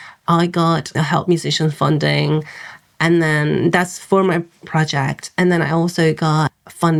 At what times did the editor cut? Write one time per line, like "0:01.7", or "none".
none